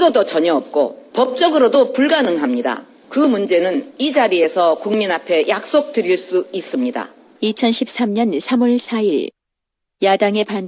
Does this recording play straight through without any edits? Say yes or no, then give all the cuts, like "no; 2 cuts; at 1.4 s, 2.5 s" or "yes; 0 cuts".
no; 2 cuts; at 1.0 s, 2.9 s